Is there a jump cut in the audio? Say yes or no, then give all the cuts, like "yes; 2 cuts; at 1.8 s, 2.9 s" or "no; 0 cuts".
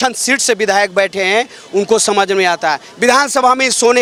no; 0 cuts